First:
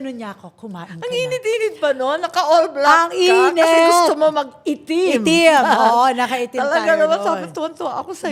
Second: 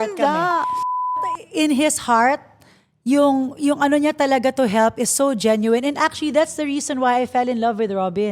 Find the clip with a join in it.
second; 1 cut; at 1.1 s

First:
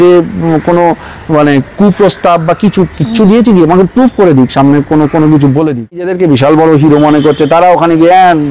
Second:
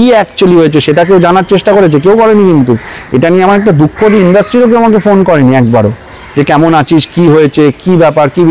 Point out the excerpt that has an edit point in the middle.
first; 1 cut; at 6.1 s

